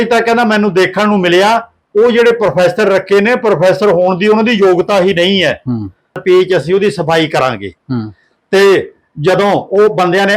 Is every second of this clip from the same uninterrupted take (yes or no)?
no